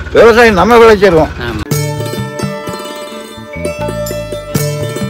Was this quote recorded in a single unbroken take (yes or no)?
yes